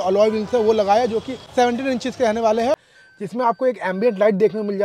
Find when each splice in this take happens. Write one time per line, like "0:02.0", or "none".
0:01.5
0:02.8